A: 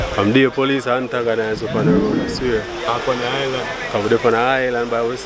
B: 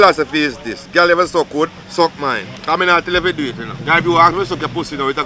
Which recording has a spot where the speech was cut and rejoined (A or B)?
B